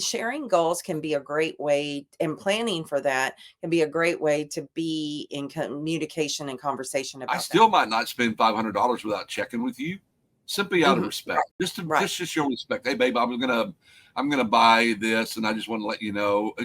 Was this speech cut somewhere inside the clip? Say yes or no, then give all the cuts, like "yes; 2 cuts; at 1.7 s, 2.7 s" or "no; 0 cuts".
yes; 2 cuts; at 7.4 s, 11.5 s